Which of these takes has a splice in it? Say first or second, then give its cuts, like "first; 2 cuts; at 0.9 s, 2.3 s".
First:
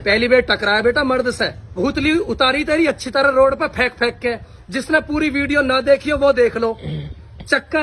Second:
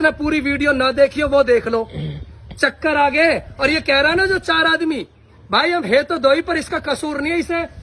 first; 1 cut; at 1.7 s